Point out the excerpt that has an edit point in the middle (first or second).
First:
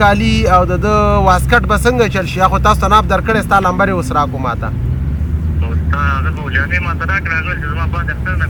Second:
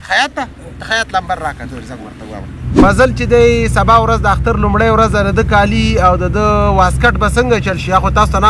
second